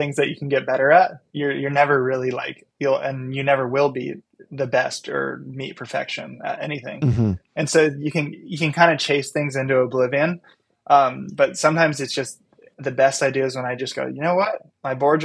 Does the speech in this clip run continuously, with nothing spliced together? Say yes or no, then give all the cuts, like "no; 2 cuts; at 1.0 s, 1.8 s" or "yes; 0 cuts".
no; 1 cut; at 12.7 s